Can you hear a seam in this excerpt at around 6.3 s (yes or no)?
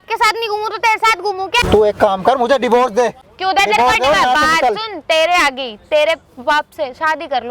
no